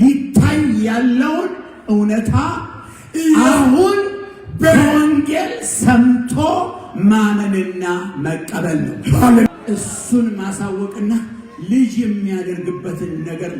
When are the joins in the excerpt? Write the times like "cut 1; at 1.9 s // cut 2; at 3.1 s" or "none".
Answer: cut 1; at 9.5 s